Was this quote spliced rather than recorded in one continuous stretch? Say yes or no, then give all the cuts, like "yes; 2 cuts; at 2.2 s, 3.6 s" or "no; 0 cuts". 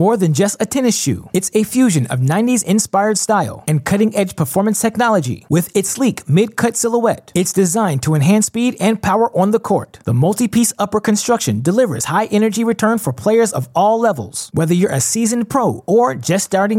no; 0 cuts